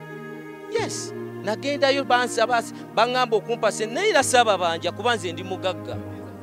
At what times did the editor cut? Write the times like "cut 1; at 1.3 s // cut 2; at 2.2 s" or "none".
none